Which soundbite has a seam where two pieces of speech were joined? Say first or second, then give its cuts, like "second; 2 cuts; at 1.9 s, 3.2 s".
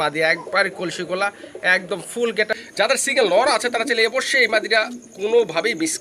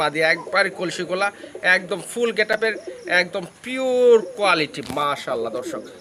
first; 1 cut; at 2.6 s